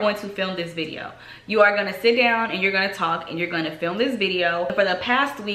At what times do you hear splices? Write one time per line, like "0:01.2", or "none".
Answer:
none